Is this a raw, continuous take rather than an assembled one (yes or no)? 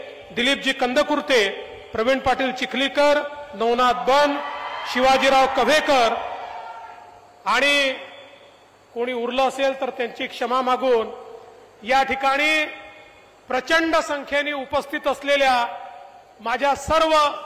yes